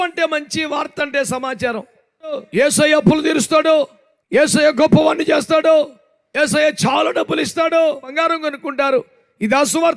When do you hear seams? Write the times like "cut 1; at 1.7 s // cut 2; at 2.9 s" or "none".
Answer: cut 1; at 2.4 s // cut 2; at 8.1 s